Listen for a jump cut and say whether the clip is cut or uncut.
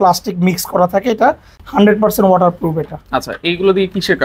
uncut